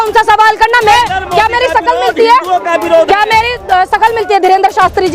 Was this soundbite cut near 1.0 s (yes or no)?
yes